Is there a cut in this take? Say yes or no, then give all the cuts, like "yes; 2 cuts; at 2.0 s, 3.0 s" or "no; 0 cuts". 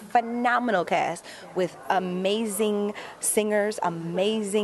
no; 0 cuts